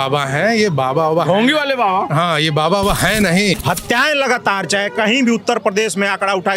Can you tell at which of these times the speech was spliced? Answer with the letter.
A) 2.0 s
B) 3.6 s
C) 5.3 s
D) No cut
B